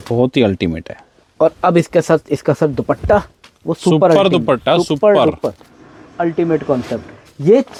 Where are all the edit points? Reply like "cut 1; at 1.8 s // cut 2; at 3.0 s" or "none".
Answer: none